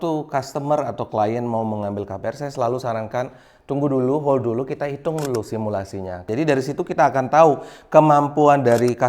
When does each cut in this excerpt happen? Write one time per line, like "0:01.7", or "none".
0:06.2